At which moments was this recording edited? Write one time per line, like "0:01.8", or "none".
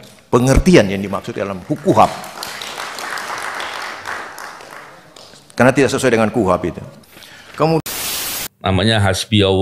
0:08.0